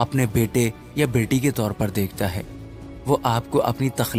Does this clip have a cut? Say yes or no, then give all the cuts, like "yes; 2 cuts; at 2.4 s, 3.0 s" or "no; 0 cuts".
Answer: no; 0 cuts